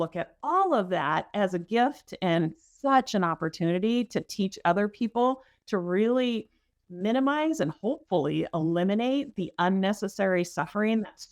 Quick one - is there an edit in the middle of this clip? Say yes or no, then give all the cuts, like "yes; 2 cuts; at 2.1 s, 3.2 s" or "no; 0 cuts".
no; 0 cuts